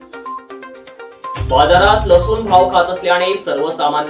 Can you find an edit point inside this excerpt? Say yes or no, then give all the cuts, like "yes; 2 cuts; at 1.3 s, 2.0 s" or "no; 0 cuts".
no; 0 cuts